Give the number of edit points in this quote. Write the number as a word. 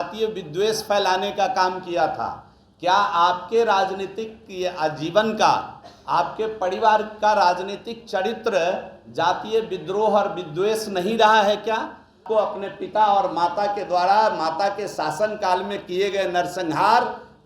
one